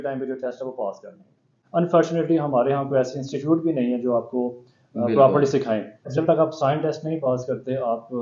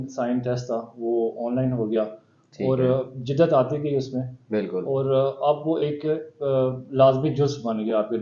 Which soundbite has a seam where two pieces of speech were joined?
first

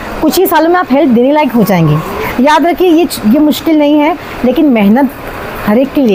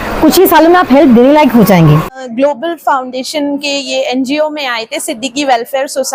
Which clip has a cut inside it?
second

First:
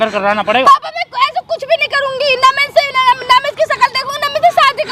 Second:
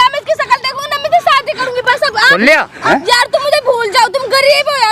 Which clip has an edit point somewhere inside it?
second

